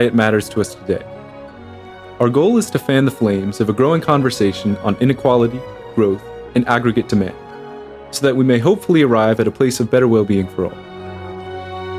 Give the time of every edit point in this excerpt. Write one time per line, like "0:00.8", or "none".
none

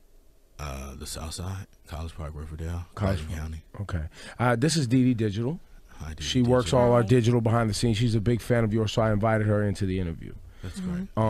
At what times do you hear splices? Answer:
0:05.4

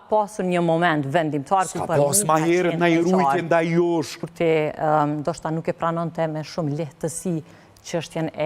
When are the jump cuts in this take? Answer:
0:04.2

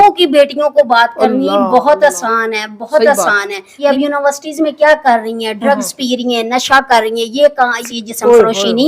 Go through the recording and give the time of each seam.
0:03.8
0:07.8

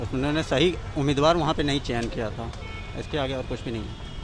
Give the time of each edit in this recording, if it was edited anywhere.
none

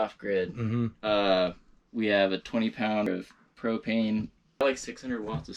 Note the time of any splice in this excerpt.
0:03.1
0:04.6

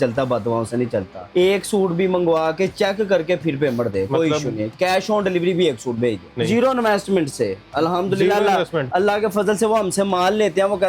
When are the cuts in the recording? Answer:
0:01.2
0:06.4

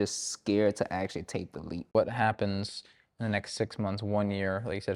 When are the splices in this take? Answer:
0:01.9

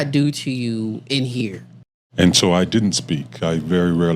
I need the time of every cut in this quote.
0:01.8

